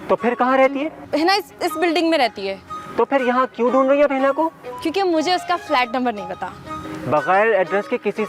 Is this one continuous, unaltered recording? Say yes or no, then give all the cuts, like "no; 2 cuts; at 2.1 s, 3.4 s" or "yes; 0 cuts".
yes; 0 cuts